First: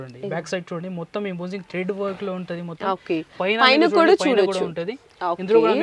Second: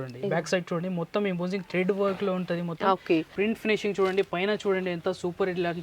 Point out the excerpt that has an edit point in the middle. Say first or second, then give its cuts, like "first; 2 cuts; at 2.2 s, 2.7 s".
second; 1 cut; at 3.3 s